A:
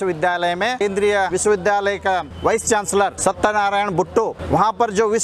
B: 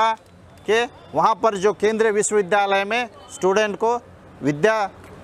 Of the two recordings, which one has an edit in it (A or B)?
A